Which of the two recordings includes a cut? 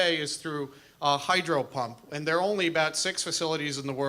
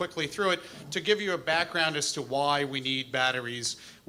first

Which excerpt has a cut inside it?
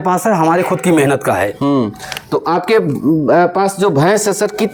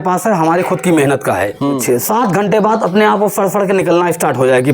second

